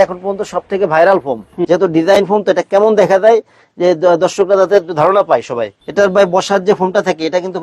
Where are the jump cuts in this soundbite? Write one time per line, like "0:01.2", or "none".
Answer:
0:01.6
0:05.8